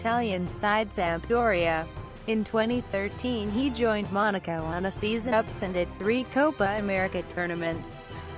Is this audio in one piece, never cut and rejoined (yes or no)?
yes